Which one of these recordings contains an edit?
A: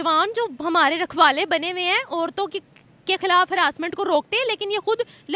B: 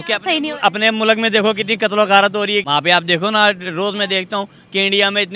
B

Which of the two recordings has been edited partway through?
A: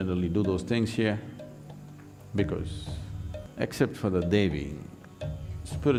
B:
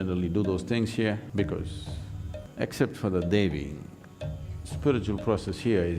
B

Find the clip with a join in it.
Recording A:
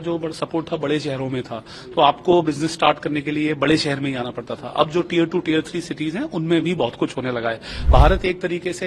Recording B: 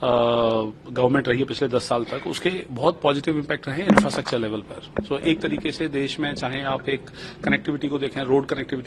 A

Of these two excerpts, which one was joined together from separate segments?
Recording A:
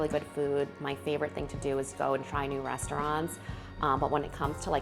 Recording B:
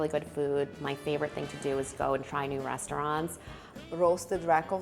B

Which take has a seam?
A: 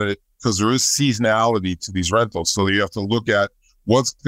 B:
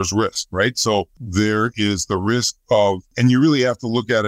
B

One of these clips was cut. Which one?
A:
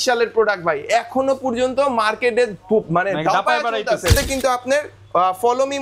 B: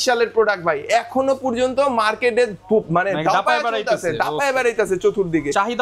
A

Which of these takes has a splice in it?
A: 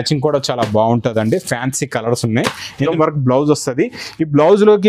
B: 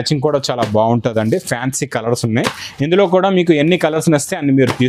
A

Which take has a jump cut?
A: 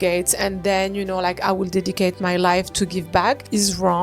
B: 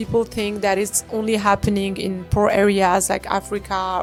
A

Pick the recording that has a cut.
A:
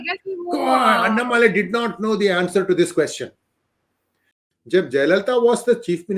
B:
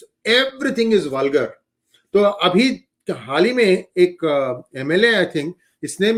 A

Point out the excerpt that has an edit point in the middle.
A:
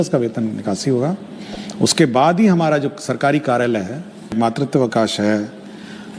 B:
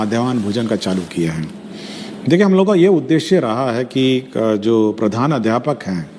A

